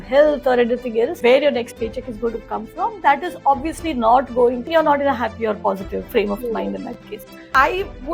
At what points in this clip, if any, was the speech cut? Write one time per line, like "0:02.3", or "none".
0:01.2

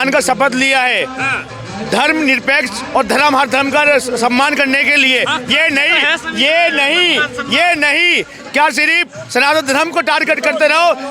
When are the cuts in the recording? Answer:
none

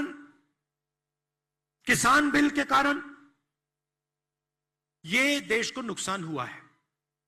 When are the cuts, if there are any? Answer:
none

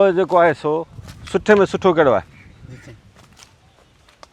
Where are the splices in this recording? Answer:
none

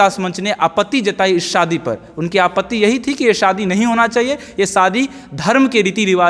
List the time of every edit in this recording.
none

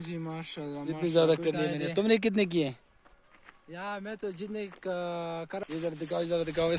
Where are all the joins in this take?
0:05.6

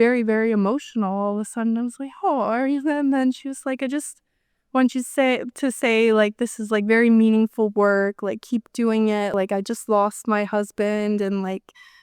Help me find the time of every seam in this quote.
0:09.3

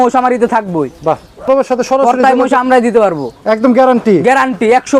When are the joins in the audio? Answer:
0:01.5

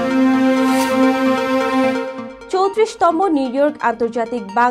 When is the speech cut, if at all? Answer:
none

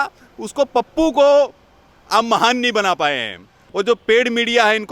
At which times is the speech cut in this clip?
0:03.6

